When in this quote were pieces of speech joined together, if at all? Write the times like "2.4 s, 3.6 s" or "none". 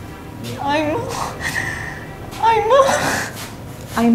none